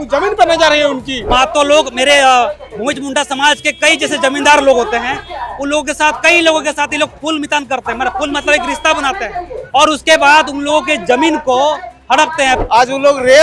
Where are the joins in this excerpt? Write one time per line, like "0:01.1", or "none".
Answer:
0:01.2
0:12.6